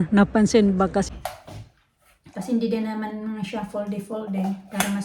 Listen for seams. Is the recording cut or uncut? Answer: cut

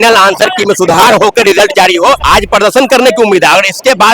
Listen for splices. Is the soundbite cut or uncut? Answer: cut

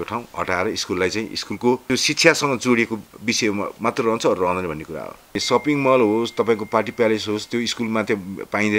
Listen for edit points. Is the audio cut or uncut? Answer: cut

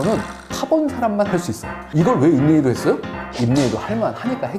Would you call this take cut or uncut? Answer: cut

